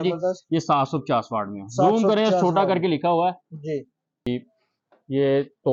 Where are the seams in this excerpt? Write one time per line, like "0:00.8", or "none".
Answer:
0:04.3